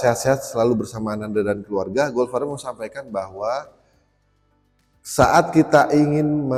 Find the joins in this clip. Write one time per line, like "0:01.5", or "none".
none